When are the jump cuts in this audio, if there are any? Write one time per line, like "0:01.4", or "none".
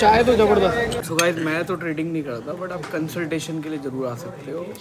0:01.0